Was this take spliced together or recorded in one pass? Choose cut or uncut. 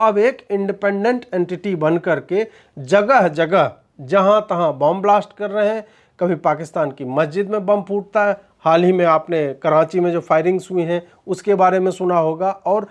uncut